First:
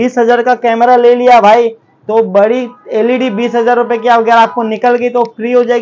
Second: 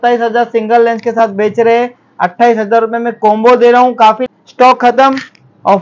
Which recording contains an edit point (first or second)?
second